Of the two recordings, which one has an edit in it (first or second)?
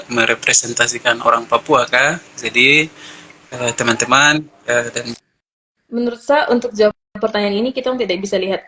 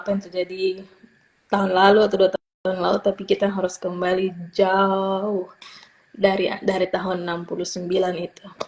first